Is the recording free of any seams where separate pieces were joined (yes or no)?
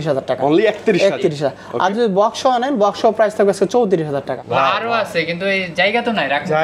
no